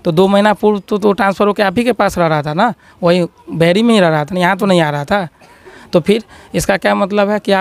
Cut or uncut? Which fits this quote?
uncut